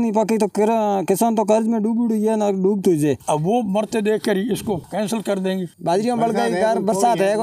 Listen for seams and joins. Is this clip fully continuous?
no; 2 cuts; at 3.2 s, 5.7 s

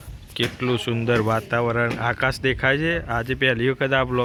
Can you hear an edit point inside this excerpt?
no; 0 cuts

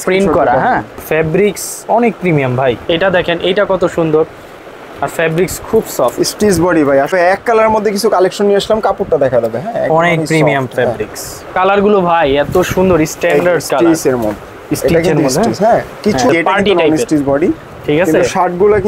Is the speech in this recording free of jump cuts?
no; 5 cuts; at 0.9 s, 2.8 s, 7.1 s, 11.5 s, 16.3 s

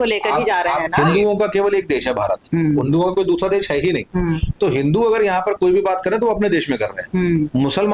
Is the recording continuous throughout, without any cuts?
no; 1 cut; at 0.9 s

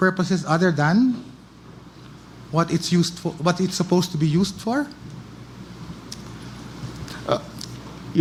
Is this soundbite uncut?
yes; 0 cuts

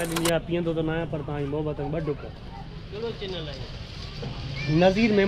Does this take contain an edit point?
no; 0 cuts

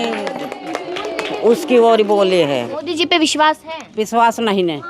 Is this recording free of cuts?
no; 1 cut; at 2.7 s

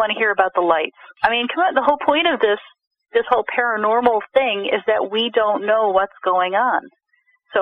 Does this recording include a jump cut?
yes; 1 cut; at 1.0 s

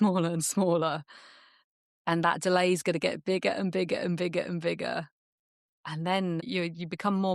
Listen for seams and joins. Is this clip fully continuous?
no; 1 cut; at 6.4 s

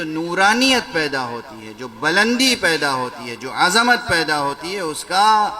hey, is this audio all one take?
yes; 0 cuts

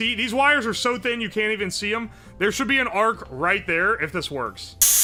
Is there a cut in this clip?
no; 0 cuts

